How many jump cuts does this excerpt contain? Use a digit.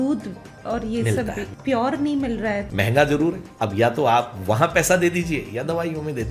3